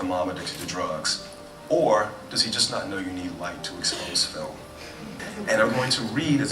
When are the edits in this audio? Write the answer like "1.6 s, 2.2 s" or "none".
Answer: 5.2 s

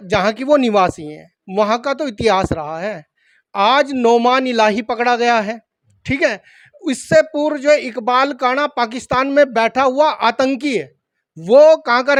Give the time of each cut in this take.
none

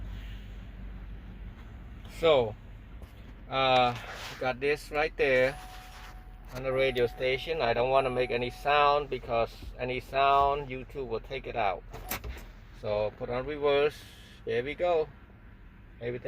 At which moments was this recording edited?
1.5 s

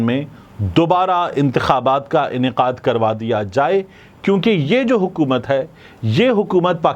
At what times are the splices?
none

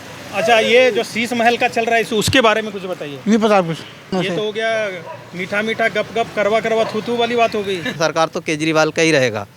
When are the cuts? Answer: 4.1 s, 8.0 s

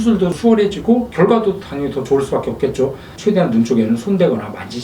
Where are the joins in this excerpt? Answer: 3.1 s

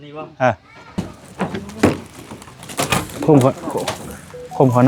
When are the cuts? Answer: 1.0 s

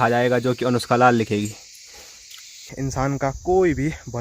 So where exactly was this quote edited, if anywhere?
2.7 s

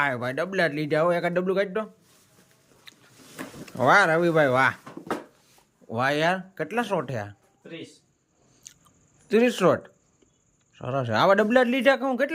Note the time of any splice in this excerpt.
none

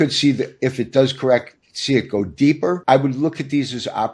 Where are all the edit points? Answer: 2.8 s

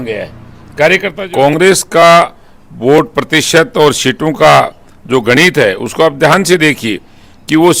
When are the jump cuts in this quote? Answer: 1.1 s

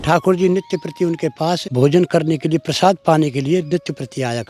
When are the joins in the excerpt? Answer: 1.7 s

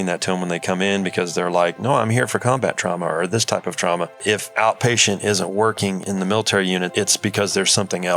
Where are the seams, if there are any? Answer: 4.2 s, 6.0 s, 6.9 s

